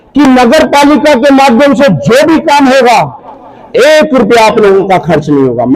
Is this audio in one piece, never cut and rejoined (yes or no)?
yes